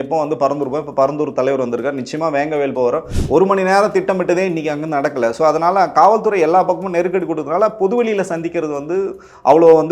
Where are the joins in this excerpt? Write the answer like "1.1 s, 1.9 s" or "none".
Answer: 3.1 s